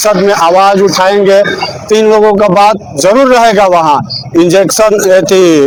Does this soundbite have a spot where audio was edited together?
no; 0 cuts

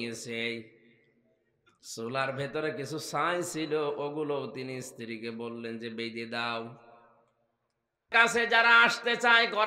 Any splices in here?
yes; 1 cut; at 8.0 s

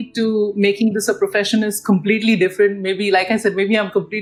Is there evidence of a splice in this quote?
no; 0 cuts

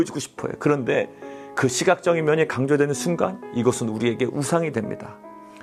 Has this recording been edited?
no; 0 cuts

